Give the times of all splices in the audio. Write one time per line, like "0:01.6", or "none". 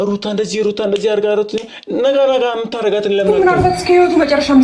0:03.3